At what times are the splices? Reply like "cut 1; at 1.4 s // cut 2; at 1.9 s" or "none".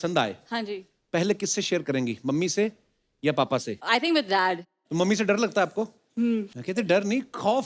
cut 1; at 3.8 s // cut 2; at 4.9 s // cut 3; at 6.5 s